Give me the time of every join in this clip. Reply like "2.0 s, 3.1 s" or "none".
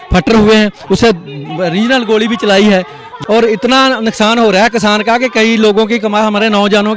3.1 s